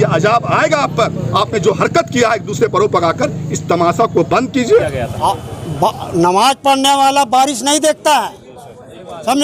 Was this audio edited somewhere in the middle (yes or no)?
yes